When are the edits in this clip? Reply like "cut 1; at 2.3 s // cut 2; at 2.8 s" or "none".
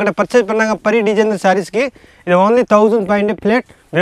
none